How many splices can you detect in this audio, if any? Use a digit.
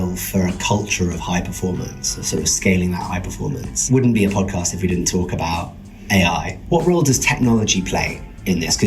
2